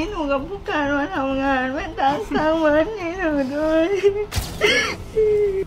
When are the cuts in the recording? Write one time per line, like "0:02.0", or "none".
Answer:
0:04.4